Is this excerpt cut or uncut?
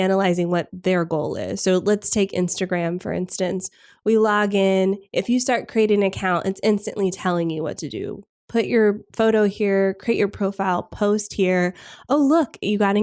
uncut